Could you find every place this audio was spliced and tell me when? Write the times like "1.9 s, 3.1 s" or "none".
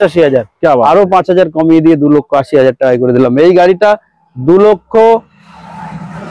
none